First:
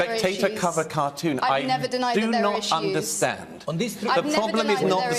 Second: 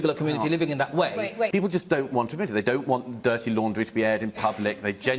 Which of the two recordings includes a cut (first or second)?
second